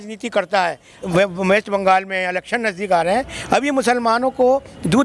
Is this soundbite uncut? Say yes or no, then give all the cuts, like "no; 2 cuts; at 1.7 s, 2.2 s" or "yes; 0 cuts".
no; 1 cut; at 1.1 s